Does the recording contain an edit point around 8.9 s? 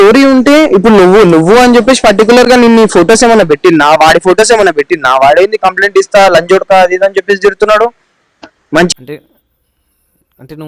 yes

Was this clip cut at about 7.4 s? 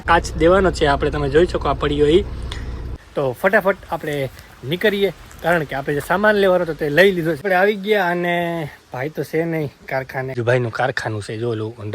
yes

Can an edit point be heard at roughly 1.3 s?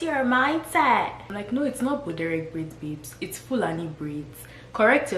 yes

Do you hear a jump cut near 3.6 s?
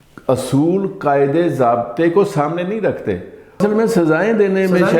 yes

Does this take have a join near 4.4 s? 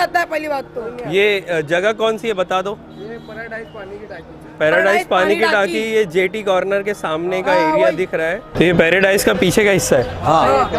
no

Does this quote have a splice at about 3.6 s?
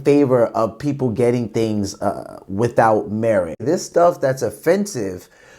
yes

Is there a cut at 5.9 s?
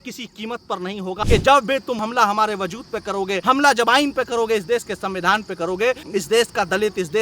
no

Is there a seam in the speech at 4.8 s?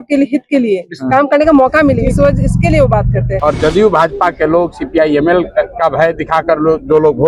no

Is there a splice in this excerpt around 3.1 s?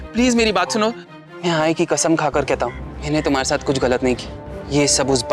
no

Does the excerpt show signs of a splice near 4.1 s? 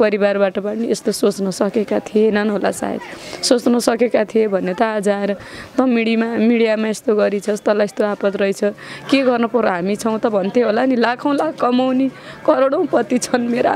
no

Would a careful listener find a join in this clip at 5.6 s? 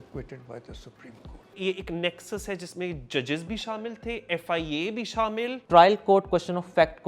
yes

